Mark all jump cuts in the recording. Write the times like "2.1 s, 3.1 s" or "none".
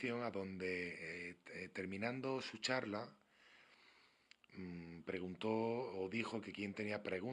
1.9 s